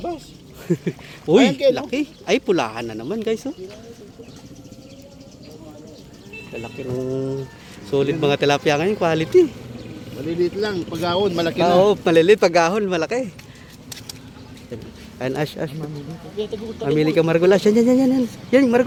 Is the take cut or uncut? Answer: uncut